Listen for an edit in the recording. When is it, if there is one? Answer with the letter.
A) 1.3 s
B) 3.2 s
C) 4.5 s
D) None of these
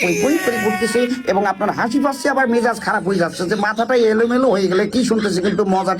D